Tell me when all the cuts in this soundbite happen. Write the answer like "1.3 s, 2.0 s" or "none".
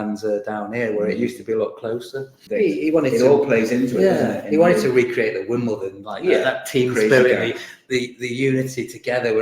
2.4 s